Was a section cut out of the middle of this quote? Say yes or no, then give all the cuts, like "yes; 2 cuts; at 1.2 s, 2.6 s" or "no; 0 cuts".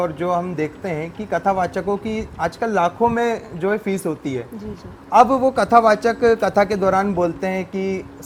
no; 0 cuts